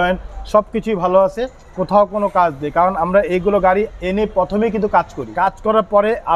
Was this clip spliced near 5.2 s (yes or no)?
yes